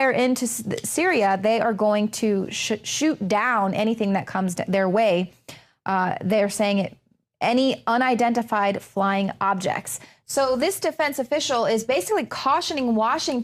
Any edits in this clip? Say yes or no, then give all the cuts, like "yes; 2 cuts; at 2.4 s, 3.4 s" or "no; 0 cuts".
yes; 1 cut; at 1.4 s